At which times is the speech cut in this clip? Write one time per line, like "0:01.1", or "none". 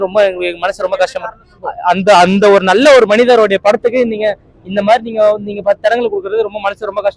0:01.4